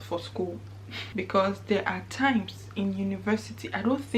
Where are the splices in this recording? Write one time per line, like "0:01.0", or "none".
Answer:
0:01.0